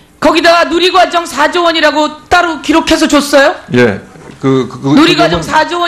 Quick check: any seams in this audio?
yes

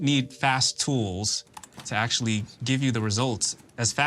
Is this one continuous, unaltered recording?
yes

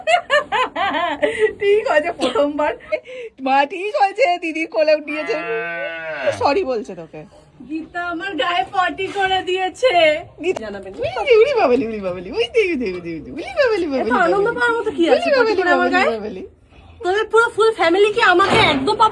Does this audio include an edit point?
yes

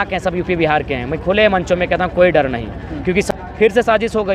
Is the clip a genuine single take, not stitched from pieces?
no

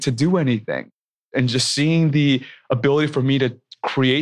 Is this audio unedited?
no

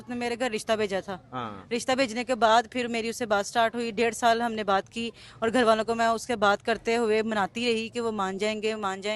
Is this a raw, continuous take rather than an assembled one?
yes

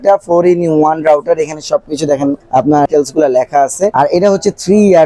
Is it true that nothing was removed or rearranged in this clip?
no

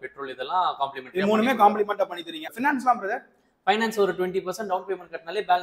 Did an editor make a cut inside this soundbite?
yes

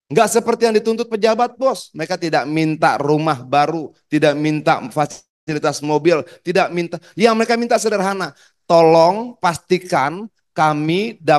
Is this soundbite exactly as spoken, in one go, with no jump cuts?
yes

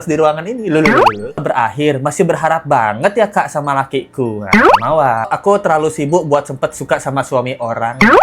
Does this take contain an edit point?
yes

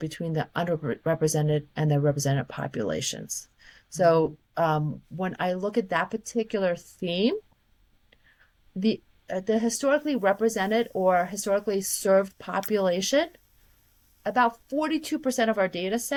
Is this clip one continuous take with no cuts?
yes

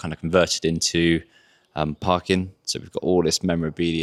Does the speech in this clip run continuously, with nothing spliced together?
yes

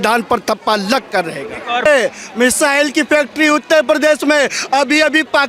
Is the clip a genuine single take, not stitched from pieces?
no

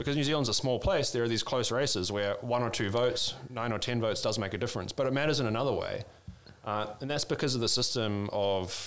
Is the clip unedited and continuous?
yes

